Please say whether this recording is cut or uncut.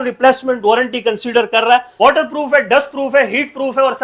cut